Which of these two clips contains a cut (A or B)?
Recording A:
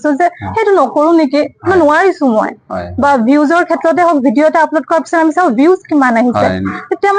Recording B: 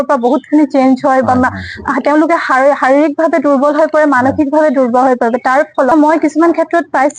B